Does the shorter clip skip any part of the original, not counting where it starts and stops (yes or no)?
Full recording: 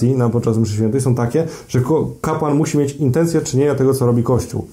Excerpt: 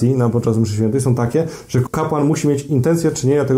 yes